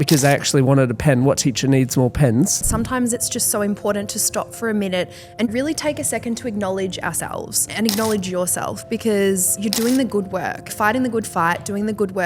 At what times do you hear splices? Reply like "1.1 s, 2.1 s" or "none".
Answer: 2.7 s, 5.5 s, 7.7 s, 9.5 s, 10.7 s